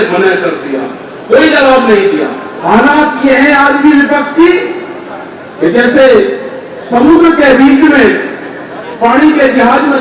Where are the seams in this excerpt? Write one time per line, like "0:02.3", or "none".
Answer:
0:02.5